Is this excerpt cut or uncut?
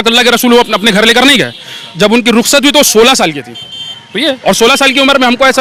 uncut